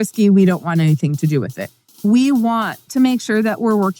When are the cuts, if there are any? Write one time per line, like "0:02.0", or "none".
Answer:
0:02.0
0:02.8